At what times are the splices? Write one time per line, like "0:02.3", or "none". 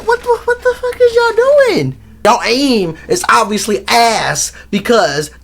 0:02.2